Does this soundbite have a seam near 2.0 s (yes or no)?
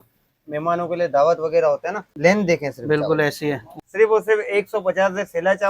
yes